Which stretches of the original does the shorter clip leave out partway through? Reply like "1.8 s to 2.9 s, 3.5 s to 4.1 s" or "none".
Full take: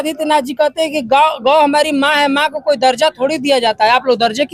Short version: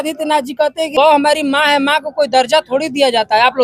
0.9 s to 1.4 s